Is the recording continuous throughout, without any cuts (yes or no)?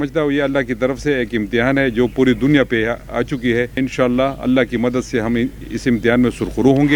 no